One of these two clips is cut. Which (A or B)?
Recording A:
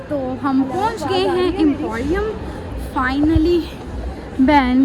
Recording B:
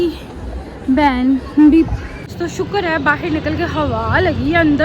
B